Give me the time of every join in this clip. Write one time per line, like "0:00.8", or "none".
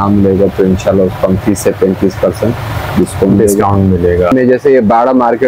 0:04.3